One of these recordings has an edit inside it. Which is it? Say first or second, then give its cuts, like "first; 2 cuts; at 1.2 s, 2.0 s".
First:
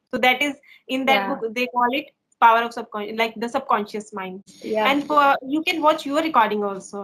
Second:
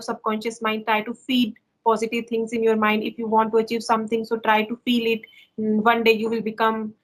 first; 1 cut; at 4.5 s